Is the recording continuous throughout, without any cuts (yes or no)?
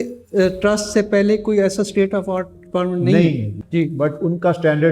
no